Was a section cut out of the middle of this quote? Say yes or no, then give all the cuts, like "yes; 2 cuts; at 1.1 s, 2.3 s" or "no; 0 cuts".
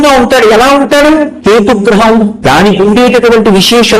yes; 2 cuts; at 1.3 s, 2.4 s